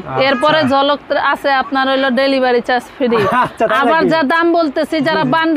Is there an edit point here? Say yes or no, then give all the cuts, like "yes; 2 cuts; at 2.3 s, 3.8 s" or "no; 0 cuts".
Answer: no; 0 cuts